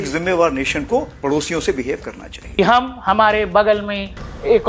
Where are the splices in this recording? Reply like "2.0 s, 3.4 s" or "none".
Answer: 1.1 s, 2.6 s